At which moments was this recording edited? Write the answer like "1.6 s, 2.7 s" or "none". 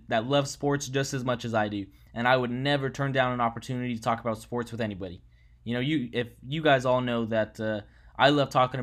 none